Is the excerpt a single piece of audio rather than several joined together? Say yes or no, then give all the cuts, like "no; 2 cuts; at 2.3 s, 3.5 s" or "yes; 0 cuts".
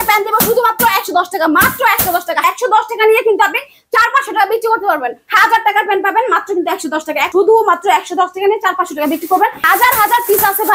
no; 4 cuts; at 2.4 s, 5.2 s, 7.3 s, 9.6 s